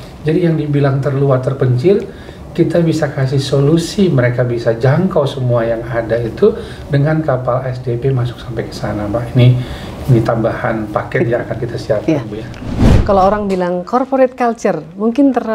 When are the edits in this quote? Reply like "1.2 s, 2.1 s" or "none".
12.7 s

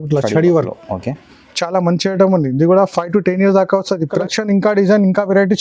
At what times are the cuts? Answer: 4.2 s

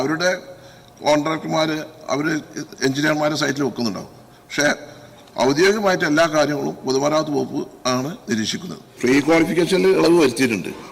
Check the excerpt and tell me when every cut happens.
8.8 s

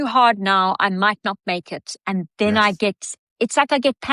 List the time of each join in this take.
none

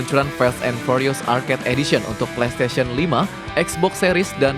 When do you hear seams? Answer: none

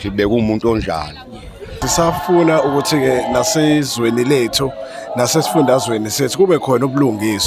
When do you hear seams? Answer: 1.8 s

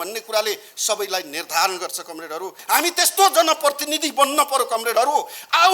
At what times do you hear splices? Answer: 2.6 s

